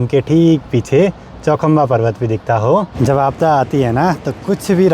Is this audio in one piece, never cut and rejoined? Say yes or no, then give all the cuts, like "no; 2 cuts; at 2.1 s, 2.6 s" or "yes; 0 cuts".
no; 1 cut; at 2.9 s